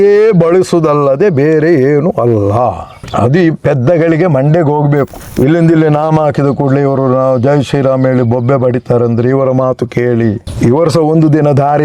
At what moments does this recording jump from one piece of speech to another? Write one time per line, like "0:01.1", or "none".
none